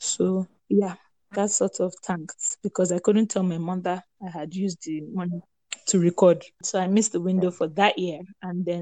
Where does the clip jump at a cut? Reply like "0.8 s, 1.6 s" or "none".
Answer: 6.6 s